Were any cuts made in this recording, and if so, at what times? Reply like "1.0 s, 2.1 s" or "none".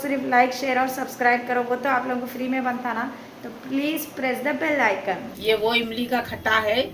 5.3 s